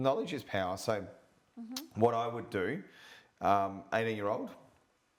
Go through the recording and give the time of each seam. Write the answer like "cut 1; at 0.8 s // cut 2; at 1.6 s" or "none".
none